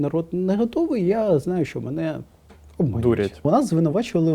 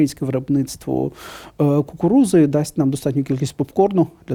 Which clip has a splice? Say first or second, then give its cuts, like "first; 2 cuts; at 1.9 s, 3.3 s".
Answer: first; 1 cut; at 3.4 s